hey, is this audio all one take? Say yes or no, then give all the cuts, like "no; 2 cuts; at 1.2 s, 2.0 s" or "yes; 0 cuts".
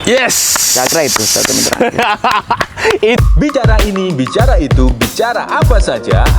no; 1 cut; at 3.2 s